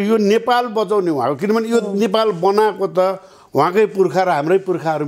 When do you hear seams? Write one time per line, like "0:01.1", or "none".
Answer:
none